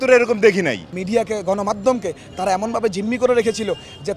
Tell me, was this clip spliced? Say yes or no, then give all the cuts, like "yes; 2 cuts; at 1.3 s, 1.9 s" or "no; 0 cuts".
yes; 1 cut; at 1.0 s